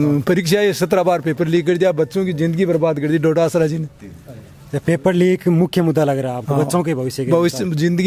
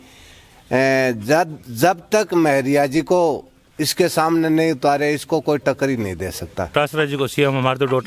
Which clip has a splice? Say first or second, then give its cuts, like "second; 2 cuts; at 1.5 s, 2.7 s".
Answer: second; 1 cut; at 6.7 s